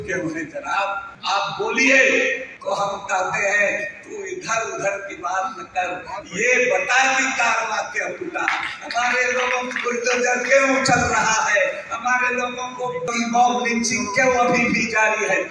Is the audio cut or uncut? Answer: cut